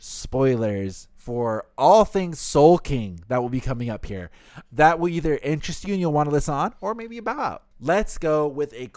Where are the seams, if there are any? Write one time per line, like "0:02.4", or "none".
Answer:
0:07.7